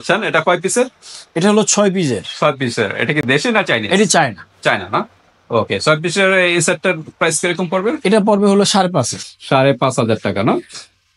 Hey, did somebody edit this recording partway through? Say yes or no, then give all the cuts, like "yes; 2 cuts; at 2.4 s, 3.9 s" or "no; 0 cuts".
no; 0 cuts